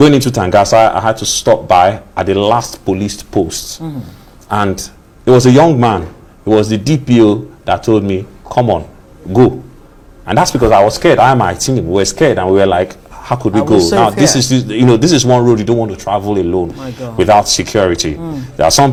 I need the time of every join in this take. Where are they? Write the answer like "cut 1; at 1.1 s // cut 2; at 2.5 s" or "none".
none